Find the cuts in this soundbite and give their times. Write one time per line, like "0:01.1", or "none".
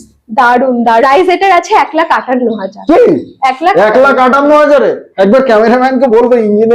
0:01.0

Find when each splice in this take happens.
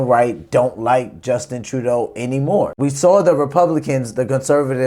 0:02.7

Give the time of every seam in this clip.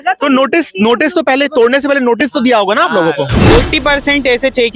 0:03.4

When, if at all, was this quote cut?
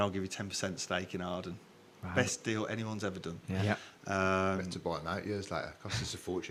none

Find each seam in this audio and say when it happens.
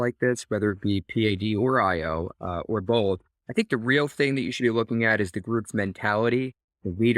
0:03.3

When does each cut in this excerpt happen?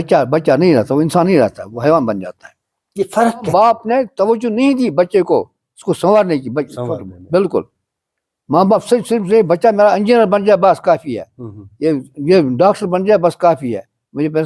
0:03.5

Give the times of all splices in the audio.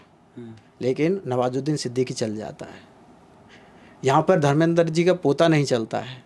none

